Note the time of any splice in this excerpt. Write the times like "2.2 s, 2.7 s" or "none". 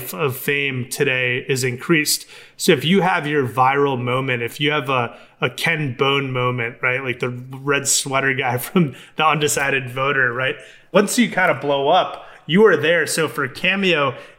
10.9 s